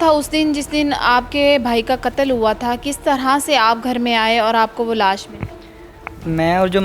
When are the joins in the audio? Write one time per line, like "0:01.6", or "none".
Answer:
none